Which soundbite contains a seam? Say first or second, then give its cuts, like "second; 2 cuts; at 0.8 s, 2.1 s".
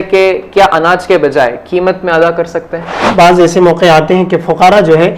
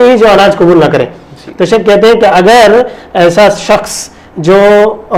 first; 1 cut; at 3.0 s